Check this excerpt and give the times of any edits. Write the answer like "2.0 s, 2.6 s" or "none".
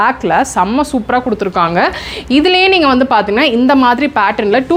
none